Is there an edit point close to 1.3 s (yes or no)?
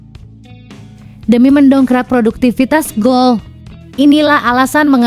yes